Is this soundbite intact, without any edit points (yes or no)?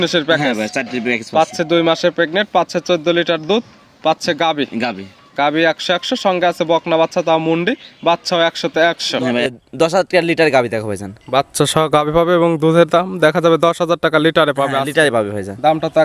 no